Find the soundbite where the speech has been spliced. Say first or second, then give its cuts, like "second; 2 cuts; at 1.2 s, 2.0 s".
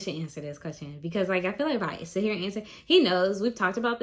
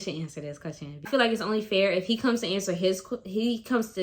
second; 1 cut; at 1.0 s